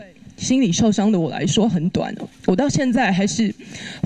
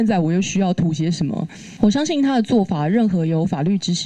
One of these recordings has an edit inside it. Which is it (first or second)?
second